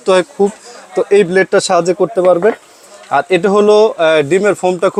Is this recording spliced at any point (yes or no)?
no